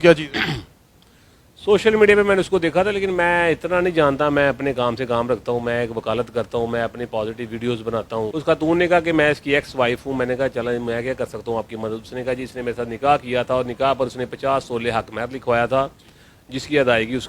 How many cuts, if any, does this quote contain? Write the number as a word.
one